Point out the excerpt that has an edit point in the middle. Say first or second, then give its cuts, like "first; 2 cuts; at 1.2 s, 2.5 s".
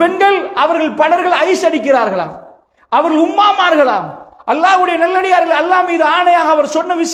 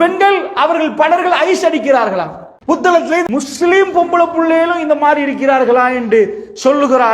second; 1 cut; at 2.9 s